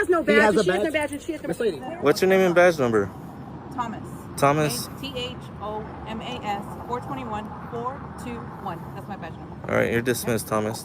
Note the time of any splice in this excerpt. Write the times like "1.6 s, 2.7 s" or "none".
1.8 s